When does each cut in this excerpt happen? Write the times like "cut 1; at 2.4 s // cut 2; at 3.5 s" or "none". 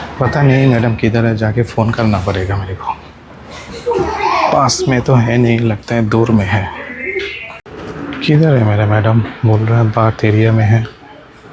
cut 1; at 3.7 s // cut 2; at 7.6 s